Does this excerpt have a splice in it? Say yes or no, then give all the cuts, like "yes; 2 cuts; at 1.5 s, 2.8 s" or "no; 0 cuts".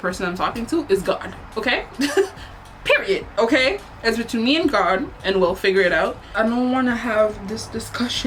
no; 0 cuts